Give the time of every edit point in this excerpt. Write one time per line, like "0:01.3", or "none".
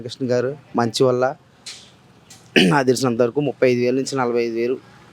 none